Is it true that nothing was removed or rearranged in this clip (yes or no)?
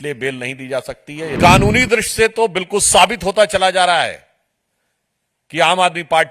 no